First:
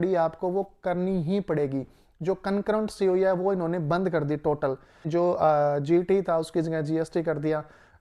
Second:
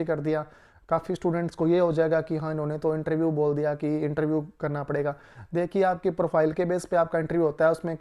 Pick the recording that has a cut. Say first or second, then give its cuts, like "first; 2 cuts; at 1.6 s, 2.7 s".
first; 1 cut; at 5.1 s